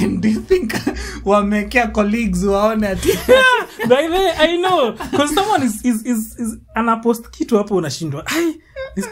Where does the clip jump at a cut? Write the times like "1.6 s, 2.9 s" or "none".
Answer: none